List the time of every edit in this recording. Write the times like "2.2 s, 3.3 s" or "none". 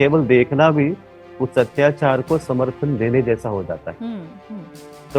none